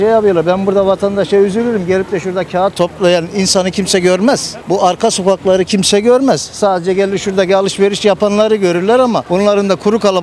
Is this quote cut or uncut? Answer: cut